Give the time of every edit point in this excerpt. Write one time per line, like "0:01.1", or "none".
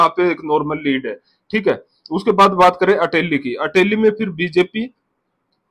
none